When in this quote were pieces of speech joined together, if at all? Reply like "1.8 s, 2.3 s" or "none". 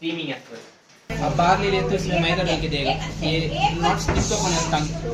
1.1 s